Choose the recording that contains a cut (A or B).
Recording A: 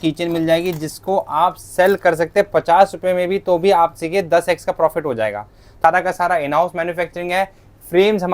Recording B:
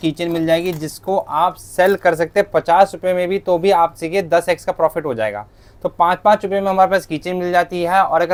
A